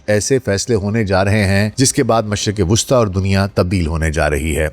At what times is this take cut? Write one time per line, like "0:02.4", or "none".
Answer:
0:01.7